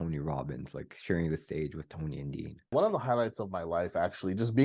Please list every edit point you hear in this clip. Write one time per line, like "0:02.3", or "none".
0:02.7